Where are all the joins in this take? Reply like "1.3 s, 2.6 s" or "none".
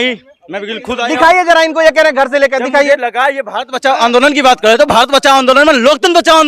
none